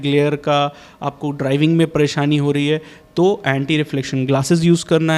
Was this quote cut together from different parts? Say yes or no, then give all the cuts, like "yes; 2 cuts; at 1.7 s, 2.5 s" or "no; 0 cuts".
no; 0 cuts